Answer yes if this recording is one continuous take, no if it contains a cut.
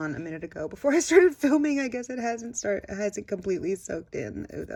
yes